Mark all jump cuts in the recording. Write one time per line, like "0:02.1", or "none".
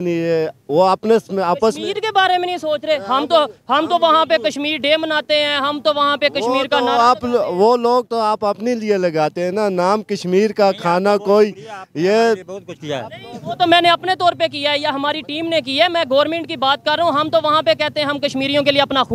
none